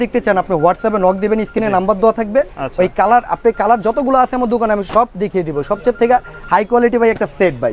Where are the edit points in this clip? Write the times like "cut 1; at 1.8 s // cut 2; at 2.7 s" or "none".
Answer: none